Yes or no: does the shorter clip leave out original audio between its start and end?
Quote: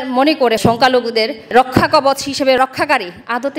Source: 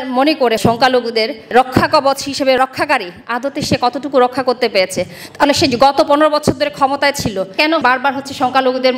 no